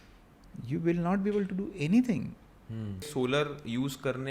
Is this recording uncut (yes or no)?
no